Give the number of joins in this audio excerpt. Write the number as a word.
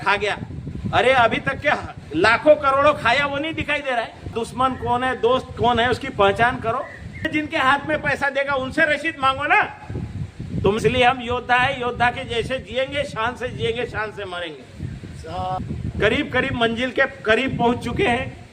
four